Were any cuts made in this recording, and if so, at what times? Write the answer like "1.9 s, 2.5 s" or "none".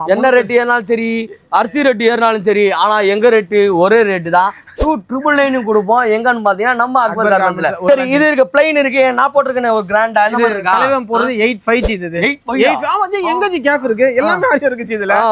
7.8 s